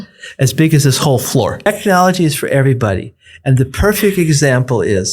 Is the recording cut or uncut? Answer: cut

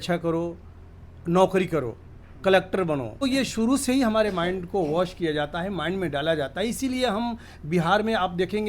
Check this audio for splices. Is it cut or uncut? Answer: cut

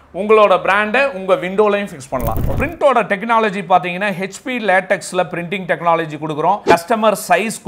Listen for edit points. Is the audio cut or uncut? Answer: cut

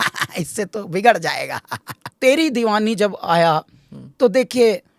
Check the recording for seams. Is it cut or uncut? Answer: cut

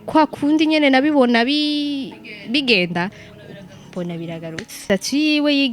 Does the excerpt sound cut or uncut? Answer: cut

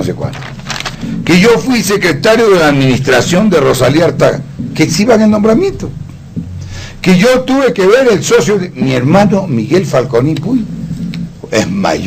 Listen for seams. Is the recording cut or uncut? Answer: cut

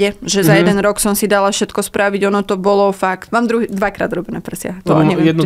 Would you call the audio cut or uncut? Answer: cut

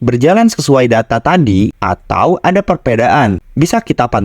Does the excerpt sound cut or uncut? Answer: uncut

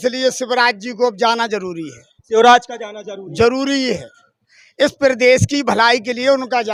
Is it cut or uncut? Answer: uncut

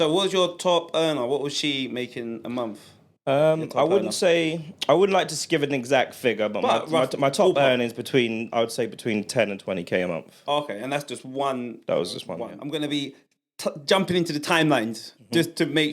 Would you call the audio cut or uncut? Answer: cut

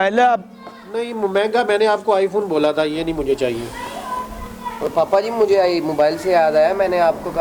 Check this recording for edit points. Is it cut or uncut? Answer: uncut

